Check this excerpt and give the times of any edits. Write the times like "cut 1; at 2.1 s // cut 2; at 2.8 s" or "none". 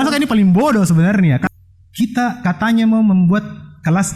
cut 1; at 1.4 s